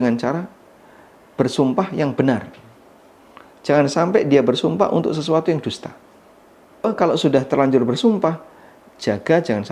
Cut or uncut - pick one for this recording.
cut